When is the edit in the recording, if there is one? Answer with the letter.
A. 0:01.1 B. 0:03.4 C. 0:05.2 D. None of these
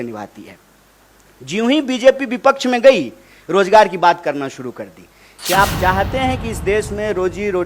C